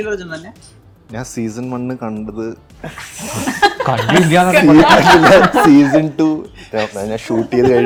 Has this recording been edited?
no; 0 cuts

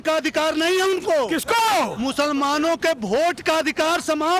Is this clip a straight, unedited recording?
yes; 0 cuts

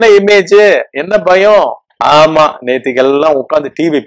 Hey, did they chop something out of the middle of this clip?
yes; 1 cut; at 1.8 s

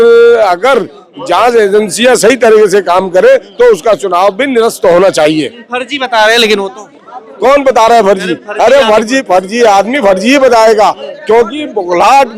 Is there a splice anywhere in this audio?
no; 0 cuts

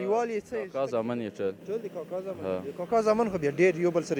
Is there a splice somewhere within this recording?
no; 0 cuts

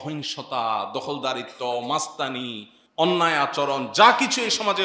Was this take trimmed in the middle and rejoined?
no; 0 cuts

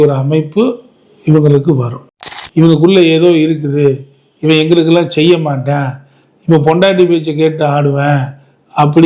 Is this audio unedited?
no; 1 cut; at 2.0 s

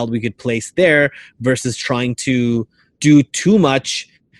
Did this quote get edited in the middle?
yes; 1 cut; at 2.8 s

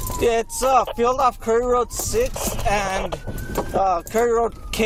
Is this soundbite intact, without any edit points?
yes; 0 cuts

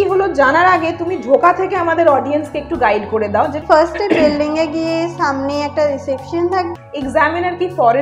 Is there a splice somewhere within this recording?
yes; 2 cuts; at 3.6 s, 6.7 s

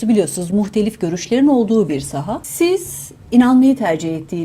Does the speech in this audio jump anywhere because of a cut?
yes; 1 cut; at 2.4 s

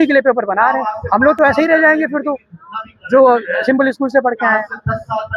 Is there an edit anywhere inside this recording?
no; 0 cuts

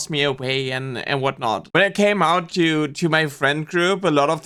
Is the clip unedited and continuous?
yes; 0 cuts

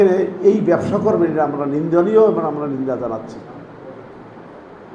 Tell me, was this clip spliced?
no; 0 cuts

